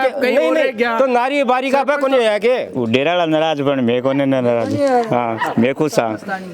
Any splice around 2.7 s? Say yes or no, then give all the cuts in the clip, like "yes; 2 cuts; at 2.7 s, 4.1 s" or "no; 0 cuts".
yes; 1 cut; at 2.7 s